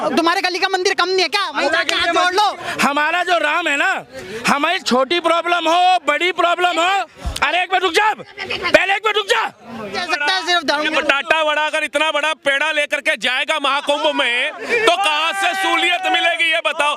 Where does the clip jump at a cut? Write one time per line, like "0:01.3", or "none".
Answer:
0:02.6
0:10.0